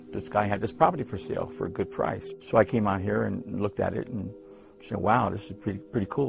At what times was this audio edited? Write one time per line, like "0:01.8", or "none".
0:03.6